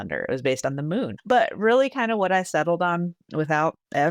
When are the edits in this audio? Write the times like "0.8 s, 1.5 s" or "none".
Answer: 1.2 s